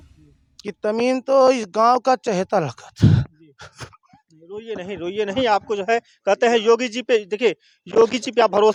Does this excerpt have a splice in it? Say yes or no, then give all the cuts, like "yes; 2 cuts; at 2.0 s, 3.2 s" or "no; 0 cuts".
no; 0 cuts